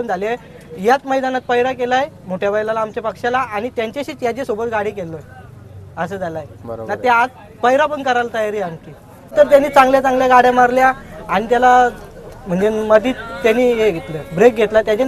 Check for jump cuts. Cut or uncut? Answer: cut